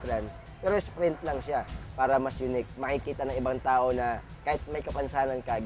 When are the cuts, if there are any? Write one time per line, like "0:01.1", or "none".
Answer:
0:01.8
0:04.3